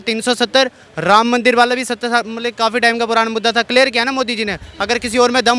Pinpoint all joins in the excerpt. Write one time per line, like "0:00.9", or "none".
none